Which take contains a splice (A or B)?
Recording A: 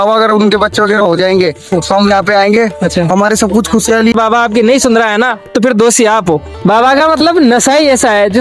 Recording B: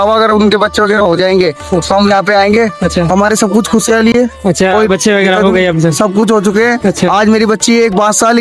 A